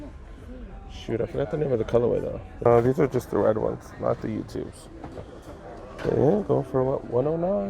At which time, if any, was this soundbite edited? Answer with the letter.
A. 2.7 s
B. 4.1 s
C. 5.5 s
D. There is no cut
A